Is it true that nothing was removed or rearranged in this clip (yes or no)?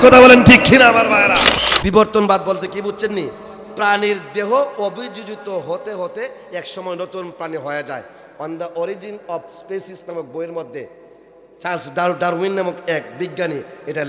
no